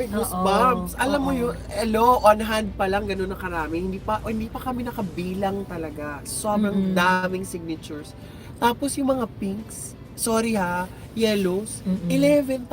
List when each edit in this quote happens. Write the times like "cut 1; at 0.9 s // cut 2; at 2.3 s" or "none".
none